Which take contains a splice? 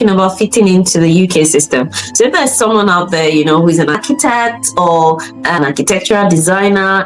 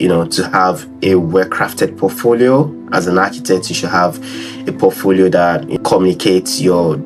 second; 1 cut; at 5.7 s

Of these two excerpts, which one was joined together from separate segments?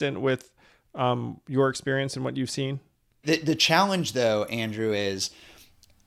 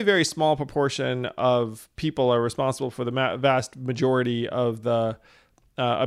first; 1 cut; at 3.2 s

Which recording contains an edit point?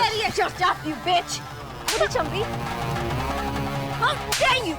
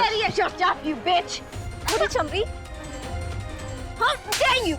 second; 2 cuts; at 2.5 s, 4.0 s

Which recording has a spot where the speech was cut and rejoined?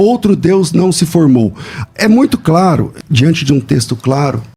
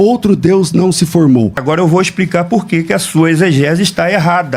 second; 1 cut; at 1.6 s

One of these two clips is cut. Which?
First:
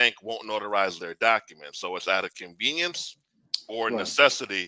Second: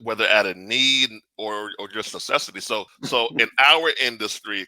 second; 1 cut; at 2.9 s

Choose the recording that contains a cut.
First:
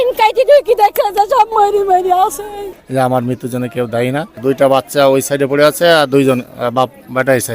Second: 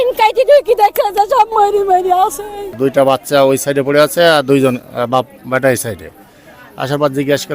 first; 2 cuts; at 2.6 s, 4.3 s

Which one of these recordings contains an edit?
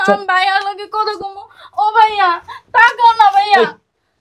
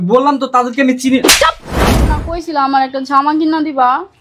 second; 1 cut; at 2.2 s

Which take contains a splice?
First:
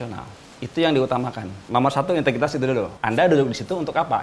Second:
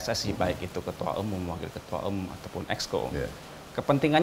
first; 2 cuts; at 1.5 s, 3.0 s

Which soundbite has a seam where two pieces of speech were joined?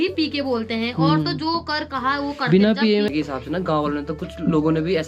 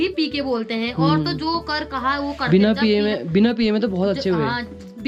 first; 1 cut; at 3.1 s

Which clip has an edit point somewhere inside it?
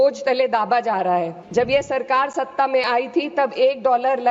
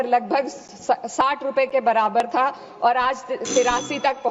first; 1 cut; at 1.4 s

